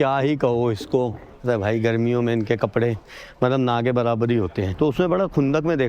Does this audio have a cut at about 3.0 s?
no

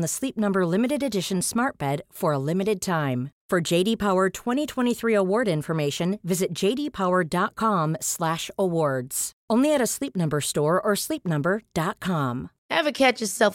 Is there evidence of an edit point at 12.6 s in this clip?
no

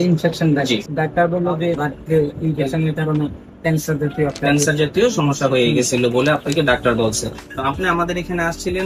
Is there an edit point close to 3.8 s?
no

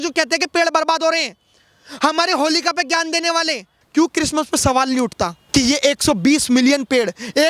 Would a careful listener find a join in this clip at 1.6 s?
no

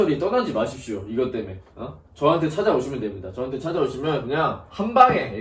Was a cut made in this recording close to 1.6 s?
no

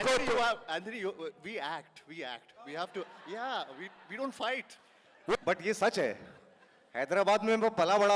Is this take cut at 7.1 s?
no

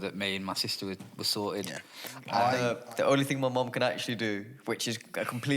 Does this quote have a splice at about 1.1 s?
no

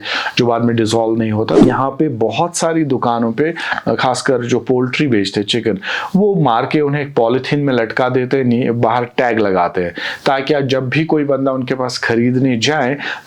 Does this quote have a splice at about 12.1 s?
no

